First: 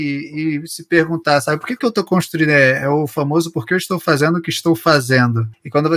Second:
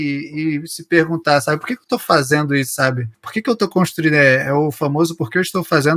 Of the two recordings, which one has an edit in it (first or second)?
first